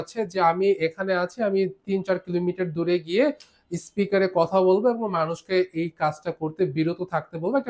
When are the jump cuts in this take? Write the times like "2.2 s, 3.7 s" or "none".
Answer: none